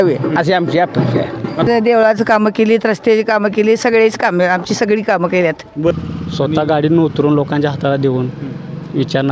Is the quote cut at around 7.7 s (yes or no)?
no